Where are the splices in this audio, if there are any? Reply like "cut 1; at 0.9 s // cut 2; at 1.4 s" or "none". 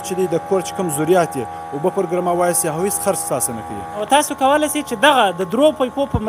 cut 1; at 4.0 s